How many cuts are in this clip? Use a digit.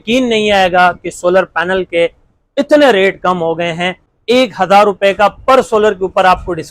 1